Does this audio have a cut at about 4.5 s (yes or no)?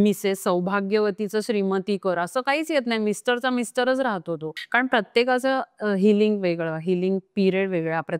yes